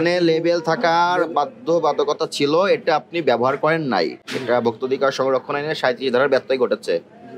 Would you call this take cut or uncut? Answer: uncut